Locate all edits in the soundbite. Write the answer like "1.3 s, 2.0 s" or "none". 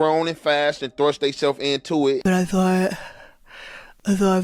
2.2 s